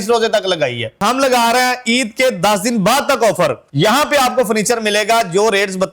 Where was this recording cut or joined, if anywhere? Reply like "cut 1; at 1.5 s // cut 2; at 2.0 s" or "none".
cut 1; at 1.0 s // cut 2; at 3.6 s